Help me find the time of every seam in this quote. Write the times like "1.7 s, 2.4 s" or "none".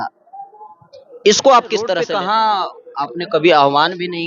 2.0 s